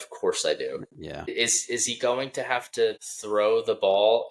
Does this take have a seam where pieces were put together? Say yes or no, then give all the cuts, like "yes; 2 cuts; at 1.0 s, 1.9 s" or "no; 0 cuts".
yes; 2 cuts; at 1.3 s, 3.1 s